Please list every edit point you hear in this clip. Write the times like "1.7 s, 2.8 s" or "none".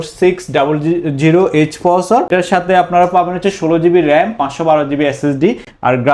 none